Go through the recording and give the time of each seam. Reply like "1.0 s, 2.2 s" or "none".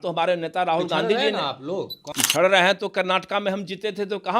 2.1 s